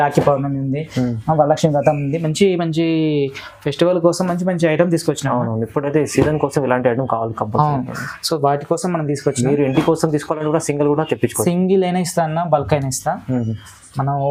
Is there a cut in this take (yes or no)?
no